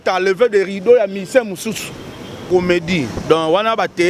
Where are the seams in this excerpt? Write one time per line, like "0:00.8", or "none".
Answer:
0:02.4